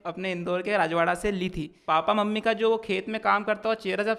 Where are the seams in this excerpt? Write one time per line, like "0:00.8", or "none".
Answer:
0:01.7